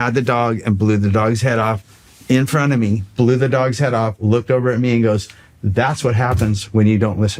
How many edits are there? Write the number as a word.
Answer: zero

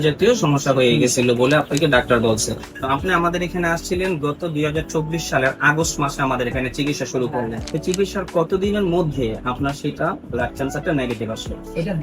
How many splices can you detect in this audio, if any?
two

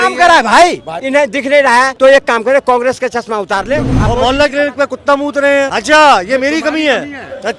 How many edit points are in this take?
four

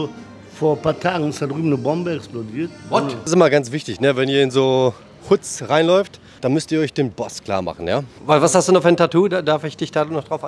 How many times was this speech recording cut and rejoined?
three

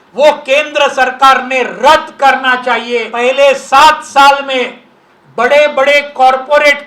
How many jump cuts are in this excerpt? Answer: one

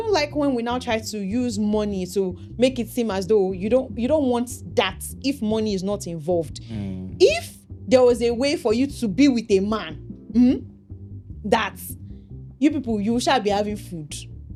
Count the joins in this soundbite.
zero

